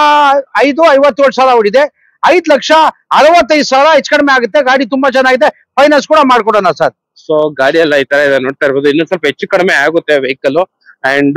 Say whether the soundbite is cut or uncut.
uncut